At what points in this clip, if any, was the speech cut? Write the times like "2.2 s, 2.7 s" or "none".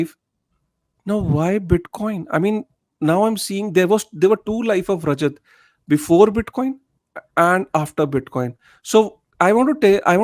none